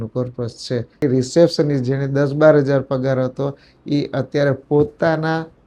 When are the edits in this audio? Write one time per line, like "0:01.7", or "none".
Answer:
0:01.0